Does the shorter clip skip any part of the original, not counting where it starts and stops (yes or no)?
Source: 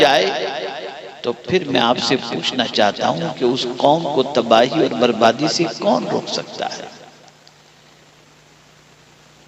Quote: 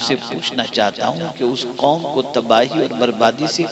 no